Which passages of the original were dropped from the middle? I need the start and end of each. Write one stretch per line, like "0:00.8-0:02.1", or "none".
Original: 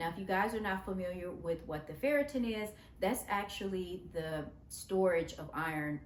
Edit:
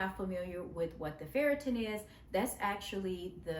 none